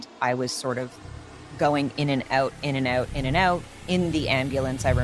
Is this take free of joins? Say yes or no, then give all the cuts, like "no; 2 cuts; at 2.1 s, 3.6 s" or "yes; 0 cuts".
yes; 0 cuts